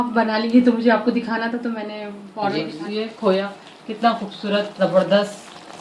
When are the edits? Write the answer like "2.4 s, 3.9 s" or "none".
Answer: 2.7 s